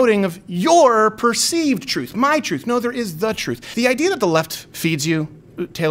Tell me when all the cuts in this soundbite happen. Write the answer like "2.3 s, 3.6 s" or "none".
3.6 s